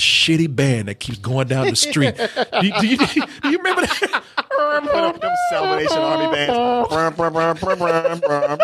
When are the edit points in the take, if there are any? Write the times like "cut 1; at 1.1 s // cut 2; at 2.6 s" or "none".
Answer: none